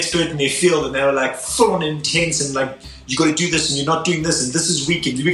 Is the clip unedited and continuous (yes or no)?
yes